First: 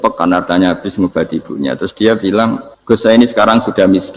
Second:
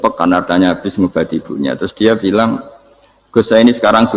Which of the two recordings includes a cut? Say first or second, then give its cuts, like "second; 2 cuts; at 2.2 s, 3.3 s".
first; 1 cut; at 2.7 s